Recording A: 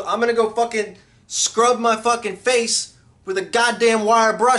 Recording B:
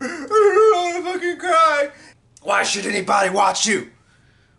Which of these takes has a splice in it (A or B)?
B